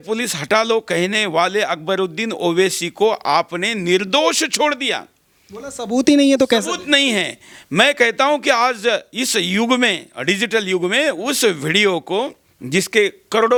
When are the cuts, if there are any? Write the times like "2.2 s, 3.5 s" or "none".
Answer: none